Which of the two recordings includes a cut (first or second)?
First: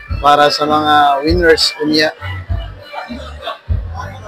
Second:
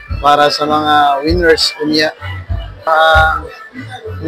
second